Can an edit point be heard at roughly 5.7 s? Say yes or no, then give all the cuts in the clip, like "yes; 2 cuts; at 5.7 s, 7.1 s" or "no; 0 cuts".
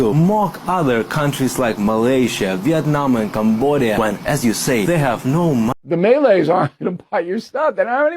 yes; 1 cut; at 5.7 s